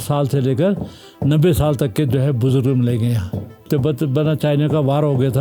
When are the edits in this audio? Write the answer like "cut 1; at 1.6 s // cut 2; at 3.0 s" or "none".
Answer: cut 1; at 3.6 s